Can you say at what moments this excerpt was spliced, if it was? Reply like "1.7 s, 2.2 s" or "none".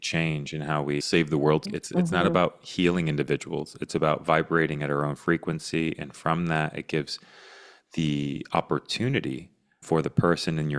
1.7 s